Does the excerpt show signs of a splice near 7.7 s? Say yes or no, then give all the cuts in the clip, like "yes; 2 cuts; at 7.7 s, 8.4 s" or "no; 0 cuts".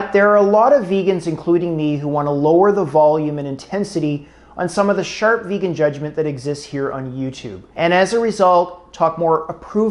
no; 0 cuts